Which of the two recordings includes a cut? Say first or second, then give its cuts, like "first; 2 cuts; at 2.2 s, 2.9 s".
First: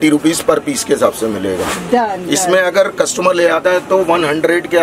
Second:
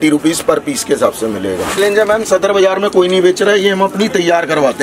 second; 1 cut; at 1.8 s